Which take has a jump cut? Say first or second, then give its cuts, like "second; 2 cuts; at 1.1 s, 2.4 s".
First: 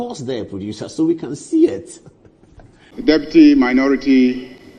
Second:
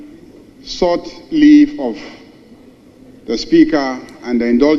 first; 1 cut; at 2.8 s